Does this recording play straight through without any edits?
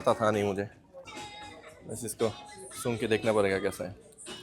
no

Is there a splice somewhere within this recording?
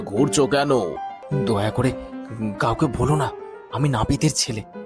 yes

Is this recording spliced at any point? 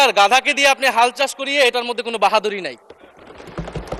no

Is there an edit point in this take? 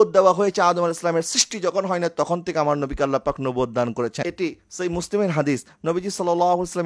yes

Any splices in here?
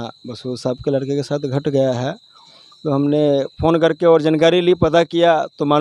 no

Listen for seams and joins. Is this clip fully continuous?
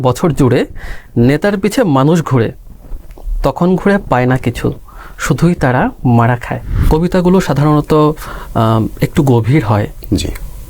no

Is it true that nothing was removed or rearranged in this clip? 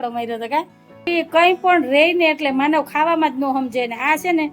no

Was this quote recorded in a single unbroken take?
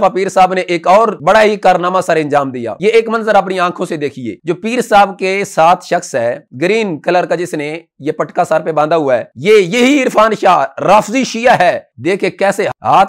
no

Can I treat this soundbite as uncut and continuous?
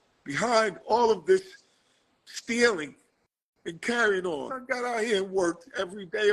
no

